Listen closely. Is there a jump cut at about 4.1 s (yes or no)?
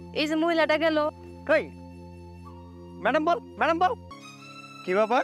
yes